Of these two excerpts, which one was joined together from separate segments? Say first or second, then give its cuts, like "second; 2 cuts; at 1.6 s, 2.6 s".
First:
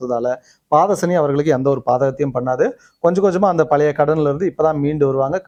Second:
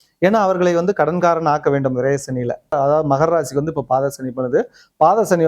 second; 1 cut; at 2.7 s